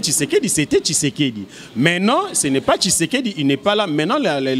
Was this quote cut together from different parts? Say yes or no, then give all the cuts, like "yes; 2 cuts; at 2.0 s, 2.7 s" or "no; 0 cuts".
no; 0 cuts